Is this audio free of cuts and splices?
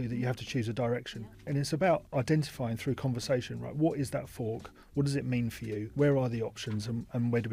yes; 0 cuts

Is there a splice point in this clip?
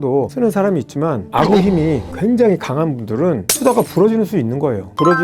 no; 0 cuts

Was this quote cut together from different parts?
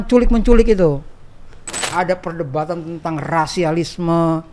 yes; 1 cut; at 1.8 s

